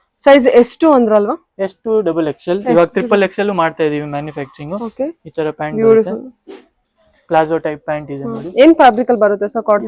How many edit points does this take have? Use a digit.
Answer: 0